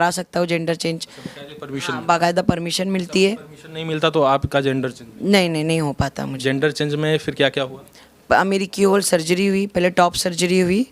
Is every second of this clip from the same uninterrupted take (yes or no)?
no